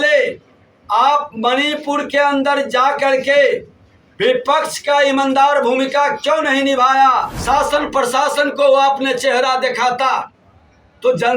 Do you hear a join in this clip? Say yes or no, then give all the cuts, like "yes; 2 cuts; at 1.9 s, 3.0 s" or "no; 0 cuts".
yes; 1 cut; at 7.3 s